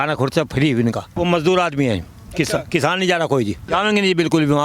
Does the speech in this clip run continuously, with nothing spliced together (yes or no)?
no